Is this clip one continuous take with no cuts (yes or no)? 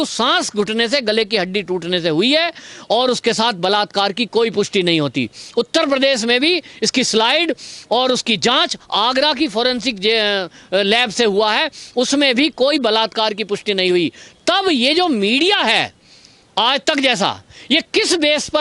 yes